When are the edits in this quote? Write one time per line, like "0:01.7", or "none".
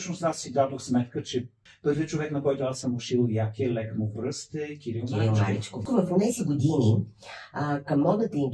0:01.7
0:05.8